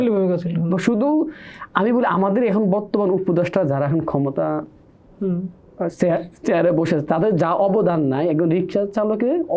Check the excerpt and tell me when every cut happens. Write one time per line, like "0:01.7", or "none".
none